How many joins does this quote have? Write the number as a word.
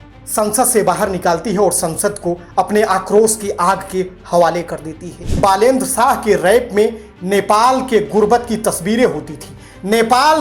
one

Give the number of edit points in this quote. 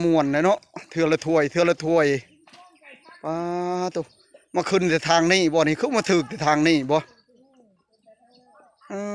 zero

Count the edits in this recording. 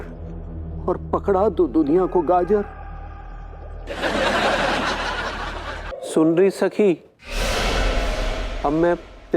one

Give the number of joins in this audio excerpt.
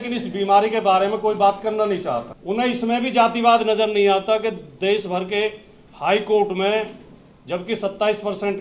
one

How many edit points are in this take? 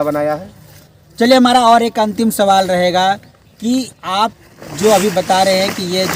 zero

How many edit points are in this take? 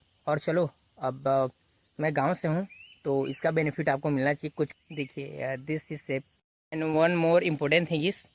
two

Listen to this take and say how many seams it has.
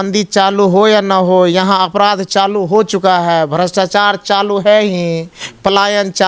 zero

